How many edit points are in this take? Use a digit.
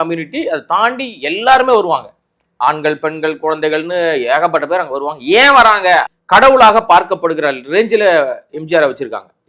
1